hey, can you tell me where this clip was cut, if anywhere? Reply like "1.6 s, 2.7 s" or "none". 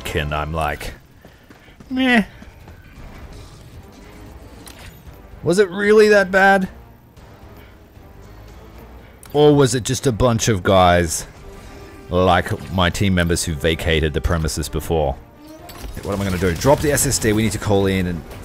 15.9 s